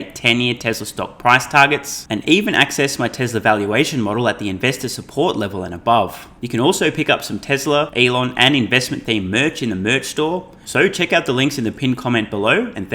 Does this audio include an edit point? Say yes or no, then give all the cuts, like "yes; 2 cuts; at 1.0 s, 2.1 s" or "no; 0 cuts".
yes; 3 cuts; at 6.3 s, 7.9 s, 10.6 s